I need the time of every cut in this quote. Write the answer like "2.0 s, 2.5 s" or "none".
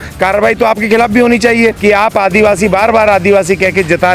1.8 s